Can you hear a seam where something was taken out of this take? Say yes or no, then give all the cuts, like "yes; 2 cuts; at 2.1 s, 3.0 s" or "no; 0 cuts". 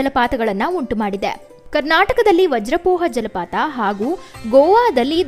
no; 0 cuts